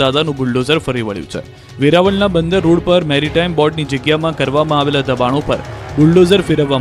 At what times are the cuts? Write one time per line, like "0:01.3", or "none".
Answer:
none

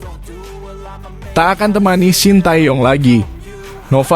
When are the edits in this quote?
0:01.3

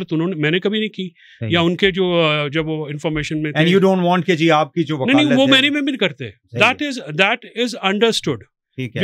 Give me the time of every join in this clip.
none

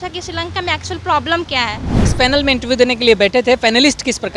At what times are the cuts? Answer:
0:02.0

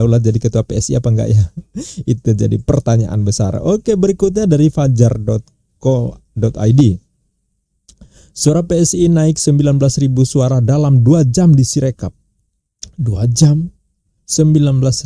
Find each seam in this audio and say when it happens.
none

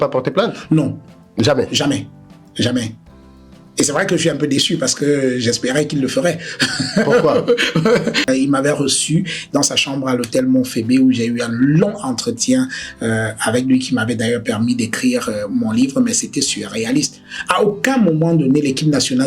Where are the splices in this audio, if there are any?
0:08.2

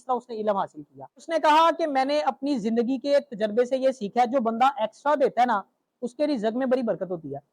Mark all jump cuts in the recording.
0:01.3

